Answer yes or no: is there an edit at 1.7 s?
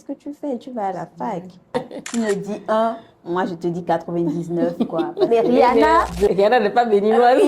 yes